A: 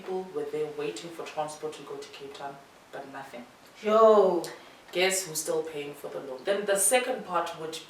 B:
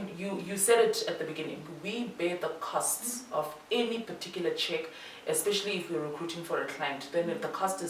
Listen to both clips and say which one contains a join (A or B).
A